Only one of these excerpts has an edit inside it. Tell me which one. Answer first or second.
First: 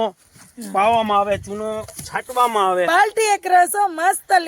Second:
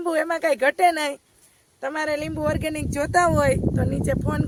first